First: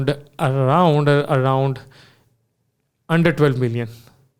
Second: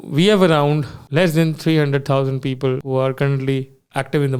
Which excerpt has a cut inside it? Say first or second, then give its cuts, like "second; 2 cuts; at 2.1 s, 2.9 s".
second; 2 cuts; at 1.0 s, 2.8 s